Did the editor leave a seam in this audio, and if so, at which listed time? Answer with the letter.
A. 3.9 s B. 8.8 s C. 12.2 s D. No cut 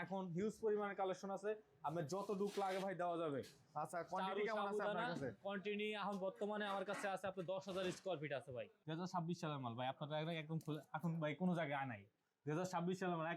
B